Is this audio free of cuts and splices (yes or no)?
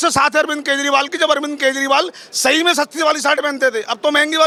yes